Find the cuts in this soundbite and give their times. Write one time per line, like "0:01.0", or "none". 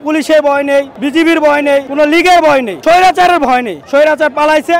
0:01.0
0:01.9
0:02.7
0:03.8

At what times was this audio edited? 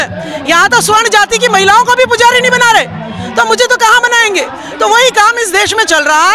0:04.6

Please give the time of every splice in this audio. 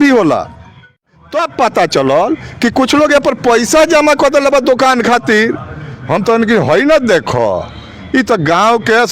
0:01.0

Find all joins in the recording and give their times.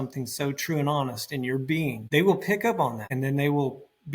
0:02.0
0:03.0

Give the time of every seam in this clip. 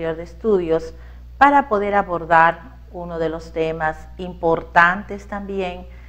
none

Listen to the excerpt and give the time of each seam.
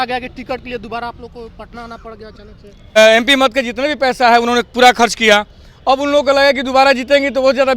0:03.0

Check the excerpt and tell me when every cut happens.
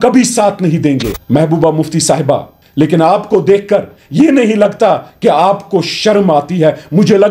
0:01.1
0:02.6

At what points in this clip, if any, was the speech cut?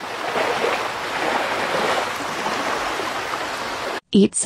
none

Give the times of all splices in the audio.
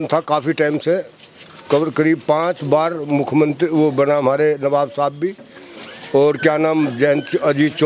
none

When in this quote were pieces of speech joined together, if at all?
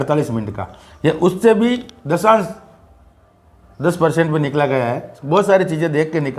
none

